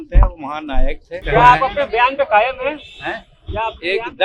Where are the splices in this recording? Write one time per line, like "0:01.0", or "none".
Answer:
0:01.2